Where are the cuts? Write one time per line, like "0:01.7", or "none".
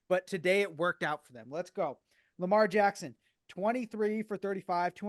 none